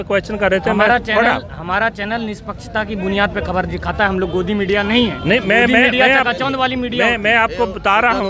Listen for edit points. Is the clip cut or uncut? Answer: uncut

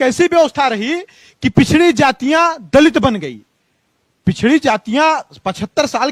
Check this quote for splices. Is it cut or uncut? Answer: uncut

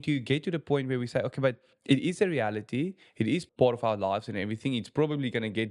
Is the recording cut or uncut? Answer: cut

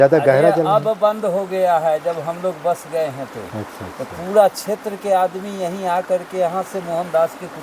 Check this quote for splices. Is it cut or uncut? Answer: uncut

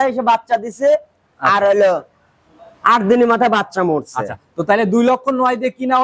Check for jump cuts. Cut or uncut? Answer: uncut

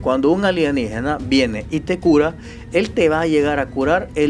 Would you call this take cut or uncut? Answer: uncut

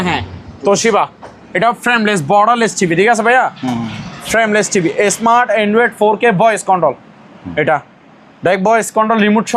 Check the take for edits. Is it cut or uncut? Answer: uncut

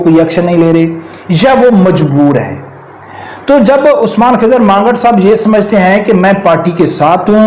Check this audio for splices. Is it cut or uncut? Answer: uncut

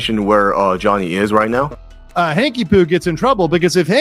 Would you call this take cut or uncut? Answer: cut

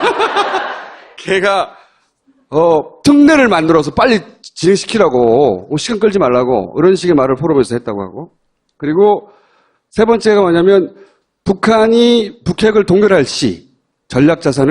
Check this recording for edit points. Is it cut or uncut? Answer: cut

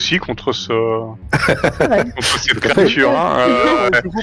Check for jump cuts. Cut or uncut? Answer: cut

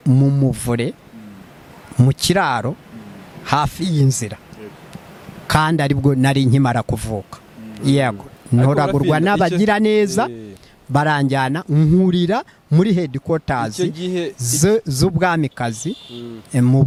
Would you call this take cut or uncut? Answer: uncut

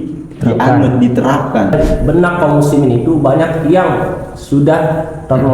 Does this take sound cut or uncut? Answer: cut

